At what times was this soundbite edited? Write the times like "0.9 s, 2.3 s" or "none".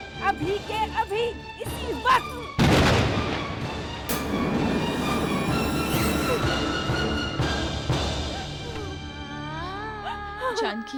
none